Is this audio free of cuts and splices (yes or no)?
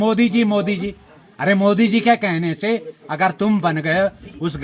yes